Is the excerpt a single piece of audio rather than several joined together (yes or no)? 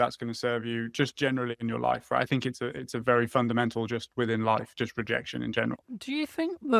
no